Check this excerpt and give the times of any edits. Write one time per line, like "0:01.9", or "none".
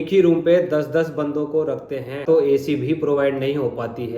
0:02.2